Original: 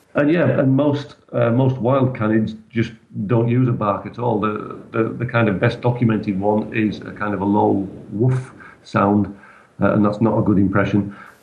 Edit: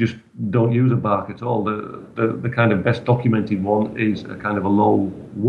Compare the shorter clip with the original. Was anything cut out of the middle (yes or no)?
no